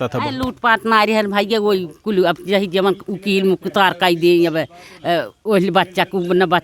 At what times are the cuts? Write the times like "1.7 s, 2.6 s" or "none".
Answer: none